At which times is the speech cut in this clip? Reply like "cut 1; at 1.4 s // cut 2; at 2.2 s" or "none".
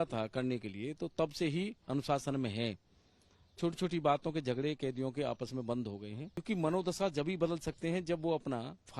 cut 1; at 6.4 s

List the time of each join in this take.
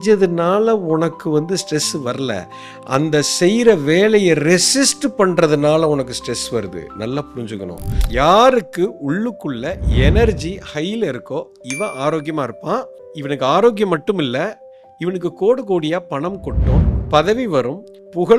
cut 1; at 7.9 s

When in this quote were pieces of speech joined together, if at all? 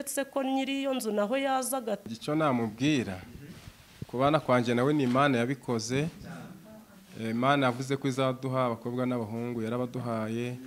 cut 1; at 2.1 s

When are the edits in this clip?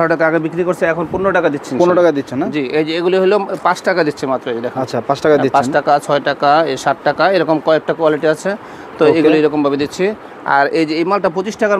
none

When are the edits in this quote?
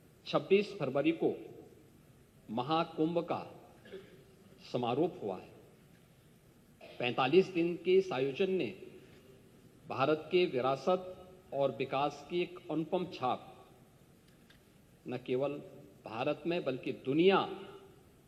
none

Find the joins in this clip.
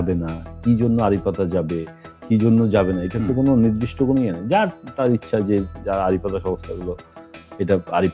none

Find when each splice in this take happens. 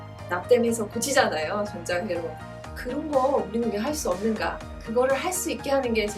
none

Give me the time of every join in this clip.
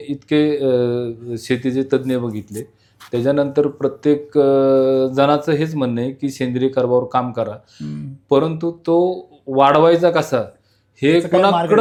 none

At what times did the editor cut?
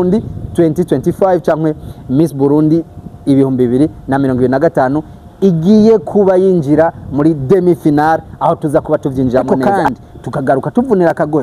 cut 1; at 9.5 s

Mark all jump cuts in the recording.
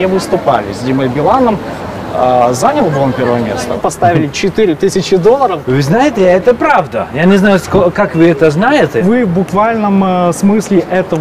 cut 1; at 3.8 s // cut 2; at 5.7 s // cut 3; at 9.0 s

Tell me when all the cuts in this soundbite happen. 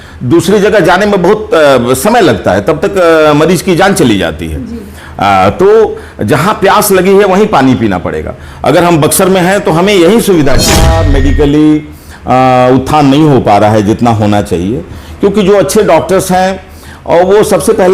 cut 1; at 11.0 s

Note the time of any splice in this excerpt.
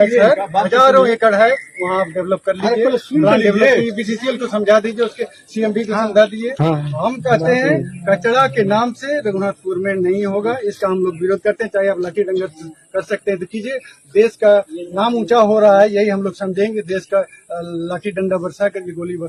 none

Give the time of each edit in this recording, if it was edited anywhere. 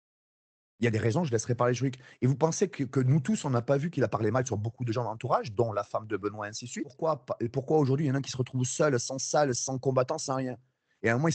cut 1; at 7.0 s

